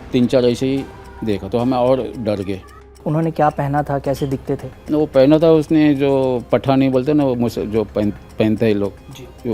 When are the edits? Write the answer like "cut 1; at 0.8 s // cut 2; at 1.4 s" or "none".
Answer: cut 1; at 3.0 s